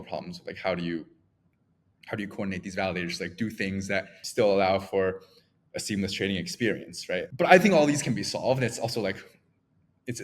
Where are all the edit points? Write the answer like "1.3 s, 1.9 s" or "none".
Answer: 4.2 s, 7.3 s